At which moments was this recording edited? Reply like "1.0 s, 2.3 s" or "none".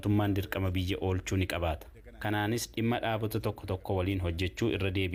none

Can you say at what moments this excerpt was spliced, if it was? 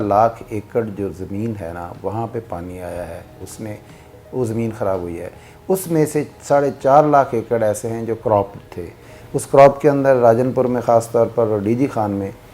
none

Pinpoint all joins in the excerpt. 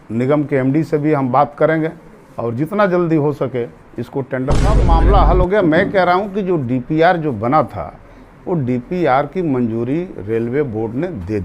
4.8 s

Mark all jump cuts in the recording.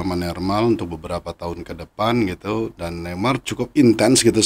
3.4 s

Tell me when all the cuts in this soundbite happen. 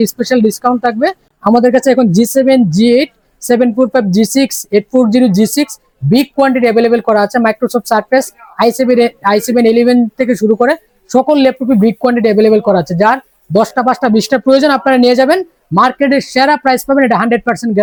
none

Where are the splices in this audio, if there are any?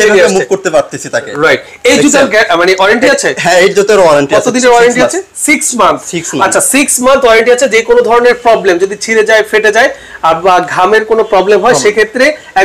none

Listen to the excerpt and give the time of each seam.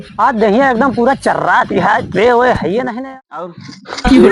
3.0 s

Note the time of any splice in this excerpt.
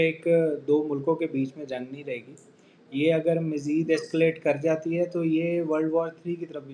none

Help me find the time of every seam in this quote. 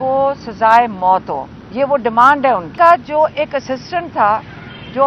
2.7 s

